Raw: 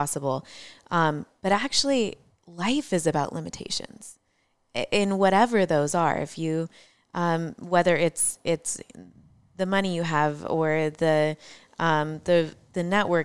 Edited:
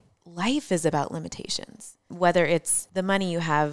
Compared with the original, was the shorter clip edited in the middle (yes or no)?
yes